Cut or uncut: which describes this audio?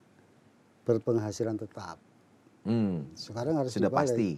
uncut